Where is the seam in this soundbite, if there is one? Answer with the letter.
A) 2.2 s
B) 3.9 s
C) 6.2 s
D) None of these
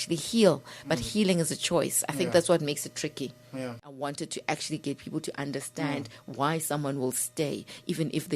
B